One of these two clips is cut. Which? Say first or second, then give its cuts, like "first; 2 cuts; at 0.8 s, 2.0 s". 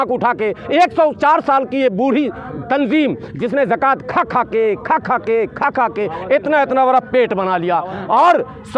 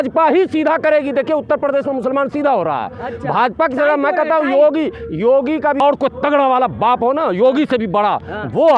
second; 1 cut; at 5.8 s